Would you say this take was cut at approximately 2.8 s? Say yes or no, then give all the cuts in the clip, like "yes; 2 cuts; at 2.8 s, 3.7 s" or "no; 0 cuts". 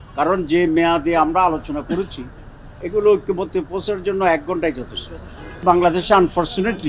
no; 1 cut; at 5.6 s